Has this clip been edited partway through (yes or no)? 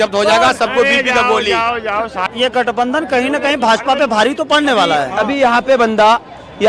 yes